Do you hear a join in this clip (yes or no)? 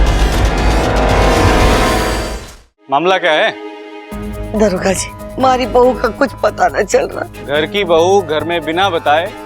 yes